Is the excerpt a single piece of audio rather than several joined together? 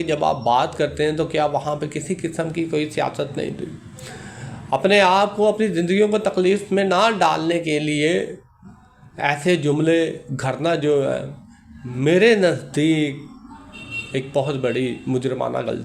yes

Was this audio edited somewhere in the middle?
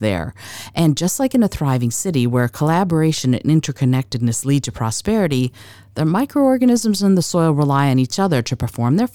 no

